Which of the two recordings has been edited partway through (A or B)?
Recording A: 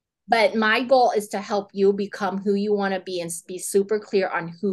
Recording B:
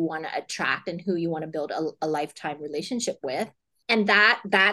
B